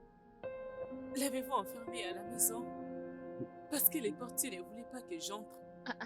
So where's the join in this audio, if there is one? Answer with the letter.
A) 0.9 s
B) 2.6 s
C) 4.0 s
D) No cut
A